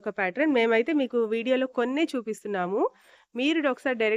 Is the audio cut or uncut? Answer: uncut